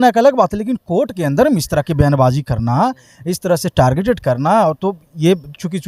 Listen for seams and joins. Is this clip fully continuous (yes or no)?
yes